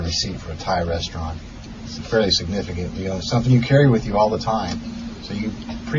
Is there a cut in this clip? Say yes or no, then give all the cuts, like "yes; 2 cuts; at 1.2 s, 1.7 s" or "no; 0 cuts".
no; 0 cuts